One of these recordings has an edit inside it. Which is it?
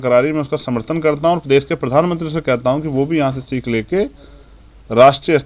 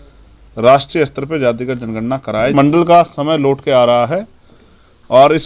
second; 1 cut; at 2.5 s

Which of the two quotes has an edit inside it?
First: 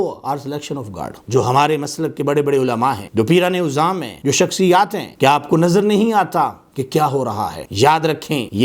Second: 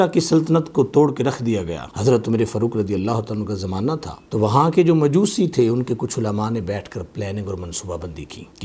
first; 1 cut; at 1.1 s

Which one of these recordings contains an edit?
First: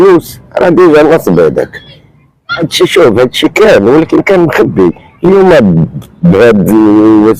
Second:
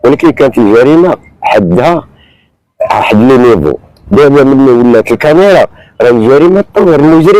first; 1 cut; at 2.7 s

